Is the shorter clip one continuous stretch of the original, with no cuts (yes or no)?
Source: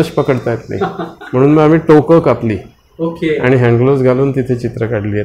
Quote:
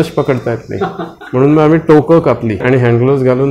no